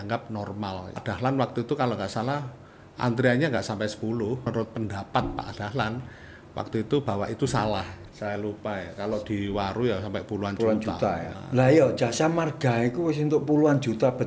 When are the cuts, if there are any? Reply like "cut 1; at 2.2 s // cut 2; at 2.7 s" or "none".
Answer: cut 1; at 1.0 s // cut 2; at 4.5 s // cut 3; at 8.0 s // cut 4; at 11.4 s